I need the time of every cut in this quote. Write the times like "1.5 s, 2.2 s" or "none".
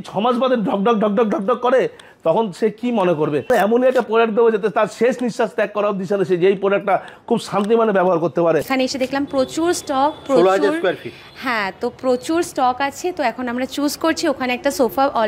3.5 s, 8.7 s